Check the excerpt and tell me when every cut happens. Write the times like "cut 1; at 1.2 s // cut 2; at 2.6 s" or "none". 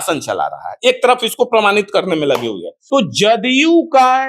cut 1; at 2.7 s